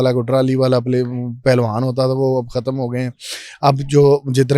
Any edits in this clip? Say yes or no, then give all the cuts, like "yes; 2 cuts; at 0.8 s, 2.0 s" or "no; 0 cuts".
no; 0 cuts